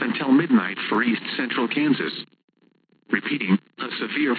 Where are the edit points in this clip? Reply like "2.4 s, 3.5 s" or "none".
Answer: 1.0 s